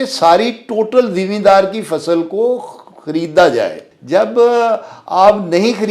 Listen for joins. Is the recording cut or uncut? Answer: cut